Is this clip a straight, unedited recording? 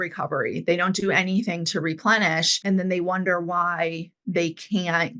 no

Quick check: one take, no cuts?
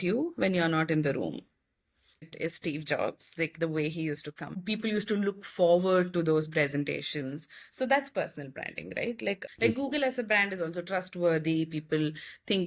no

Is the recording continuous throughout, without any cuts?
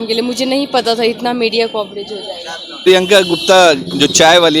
no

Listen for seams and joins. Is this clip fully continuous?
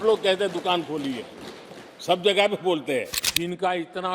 no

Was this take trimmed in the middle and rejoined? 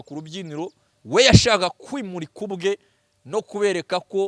no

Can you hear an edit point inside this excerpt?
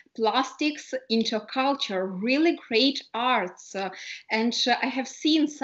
no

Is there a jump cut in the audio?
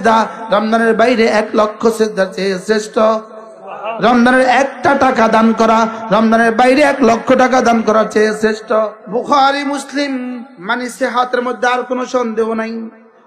yes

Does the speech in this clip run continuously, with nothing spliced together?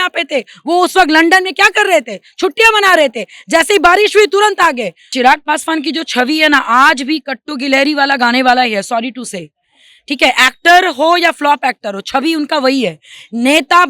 no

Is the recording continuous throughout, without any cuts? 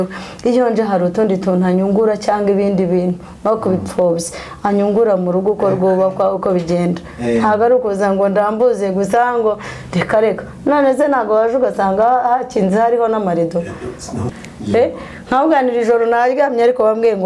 no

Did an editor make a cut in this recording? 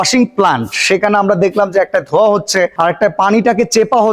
yes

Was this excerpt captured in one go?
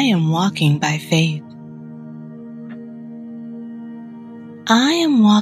yes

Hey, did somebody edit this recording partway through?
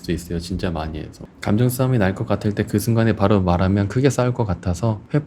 yes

